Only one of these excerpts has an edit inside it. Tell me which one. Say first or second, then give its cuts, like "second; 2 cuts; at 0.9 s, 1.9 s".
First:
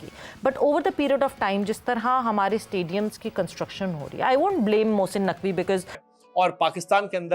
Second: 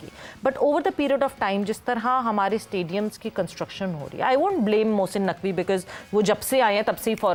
first; 1 cut; at 6.0 s